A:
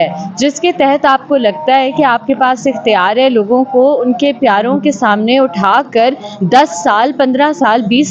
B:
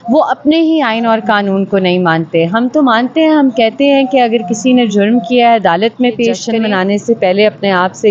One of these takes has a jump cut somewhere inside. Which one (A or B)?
B